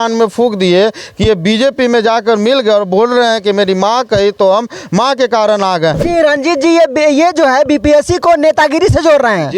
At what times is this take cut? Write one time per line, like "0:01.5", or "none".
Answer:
0:06.0